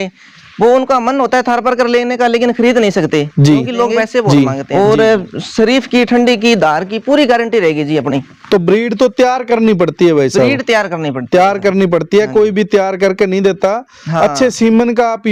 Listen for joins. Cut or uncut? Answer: cut